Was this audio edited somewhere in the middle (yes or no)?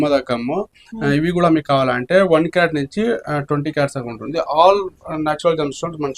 no